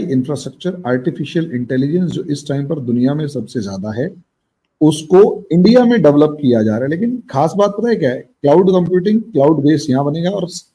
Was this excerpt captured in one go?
yes; 0 cuts

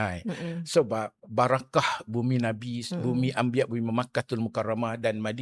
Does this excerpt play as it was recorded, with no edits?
yes; 0 cuts

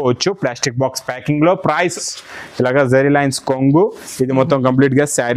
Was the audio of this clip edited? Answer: yes; 1 cut; at 2.0 s

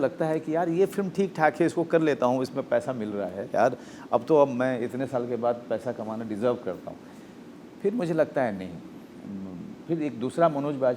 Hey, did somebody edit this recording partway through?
no; 0 cuts

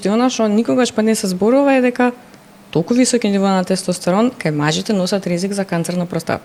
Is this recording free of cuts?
yes; 0 cuts

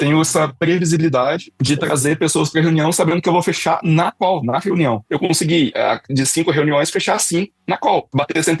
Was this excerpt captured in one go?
no; 1 cut; at 5.0 s

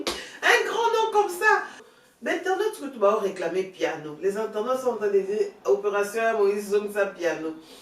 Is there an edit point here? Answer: yes; 1 cut; at 1.8 s

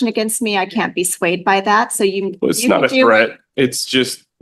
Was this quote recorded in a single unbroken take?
yes; 0 cuts

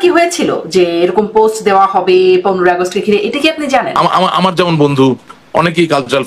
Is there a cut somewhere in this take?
yes; 1 cut; at 3.9 s

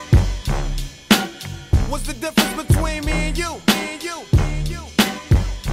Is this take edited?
yes; 1 cut; at 2.0 s

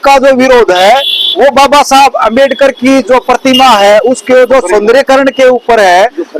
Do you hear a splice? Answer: no; 0 cuts

